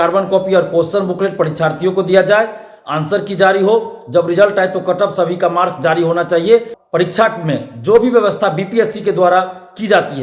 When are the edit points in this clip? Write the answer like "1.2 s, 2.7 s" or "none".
6.8 s